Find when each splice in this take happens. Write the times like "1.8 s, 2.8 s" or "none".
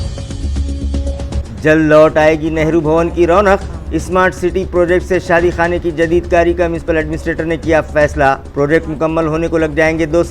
1.0 s